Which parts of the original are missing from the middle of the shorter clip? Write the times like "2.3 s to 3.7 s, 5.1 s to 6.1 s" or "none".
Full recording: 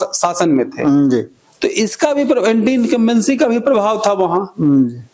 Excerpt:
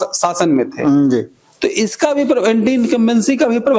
none